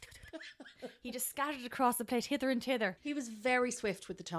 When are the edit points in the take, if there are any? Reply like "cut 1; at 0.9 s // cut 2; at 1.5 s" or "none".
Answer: cut 1; at 3.0 s